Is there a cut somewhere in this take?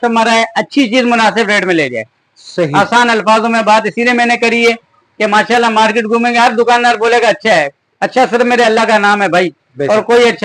no; 0 cuts

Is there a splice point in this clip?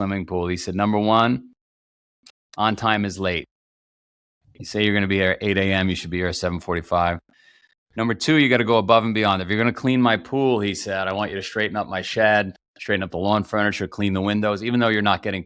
no; 0 cuts

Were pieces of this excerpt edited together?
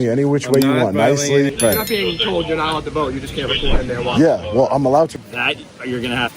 yes; 2 cuts; at 1.5 s, 5.2 s

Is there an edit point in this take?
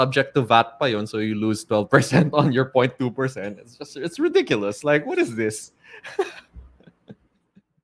no; 0 cuts

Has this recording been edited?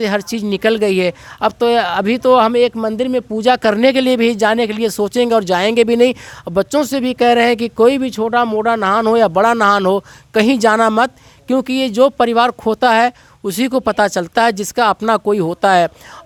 no; 0 cuts

